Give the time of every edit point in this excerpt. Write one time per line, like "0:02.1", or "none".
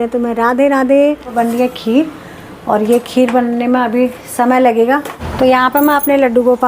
0:01.3
0:05.2